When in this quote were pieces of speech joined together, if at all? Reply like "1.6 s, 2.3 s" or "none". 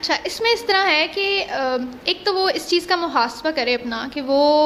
none